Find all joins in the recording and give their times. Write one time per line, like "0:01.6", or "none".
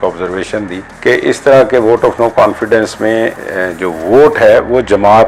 none